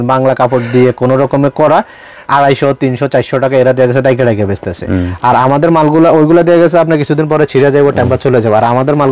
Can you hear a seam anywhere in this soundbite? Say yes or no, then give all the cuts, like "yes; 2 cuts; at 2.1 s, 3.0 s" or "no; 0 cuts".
no; 0 cuts